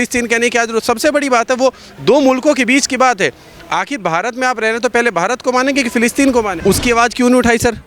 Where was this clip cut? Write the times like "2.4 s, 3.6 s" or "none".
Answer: 6.5 s